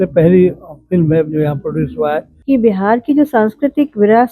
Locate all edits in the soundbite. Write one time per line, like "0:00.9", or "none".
0:02.3